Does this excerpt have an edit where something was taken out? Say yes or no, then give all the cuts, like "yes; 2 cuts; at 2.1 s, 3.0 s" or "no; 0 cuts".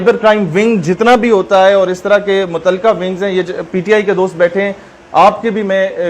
no; 0 cuts